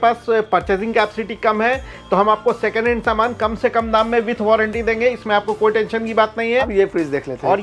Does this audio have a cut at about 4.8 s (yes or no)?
no